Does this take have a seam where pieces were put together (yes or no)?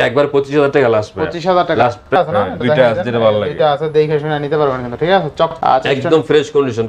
yes